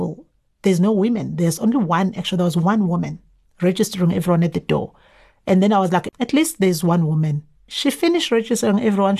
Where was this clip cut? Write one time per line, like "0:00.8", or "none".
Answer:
0:06.1
0:07.7

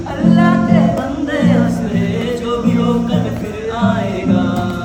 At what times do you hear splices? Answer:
none

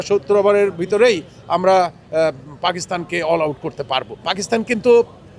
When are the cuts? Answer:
0:04.3

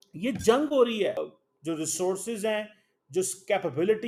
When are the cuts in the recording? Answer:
none

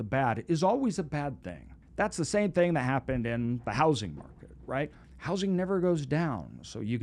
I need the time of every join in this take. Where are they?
0:01.8

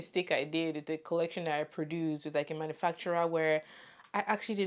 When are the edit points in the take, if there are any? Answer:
none

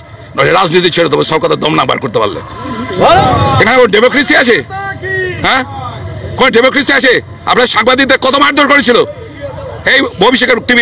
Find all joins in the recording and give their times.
none

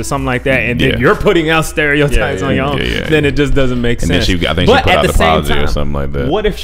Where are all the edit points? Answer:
none

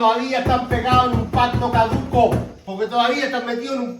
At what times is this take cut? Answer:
0:02.6

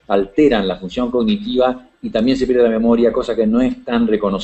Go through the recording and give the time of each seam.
0:02.5

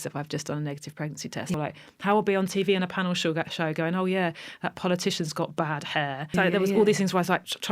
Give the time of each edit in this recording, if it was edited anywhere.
0:01.5
0:06.3

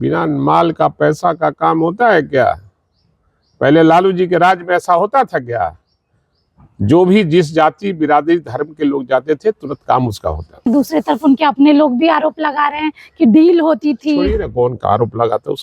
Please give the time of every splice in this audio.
0:10.7

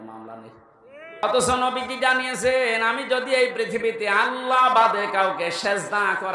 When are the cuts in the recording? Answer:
0:01.2

